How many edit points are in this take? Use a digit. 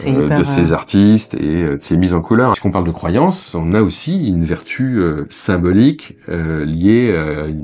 1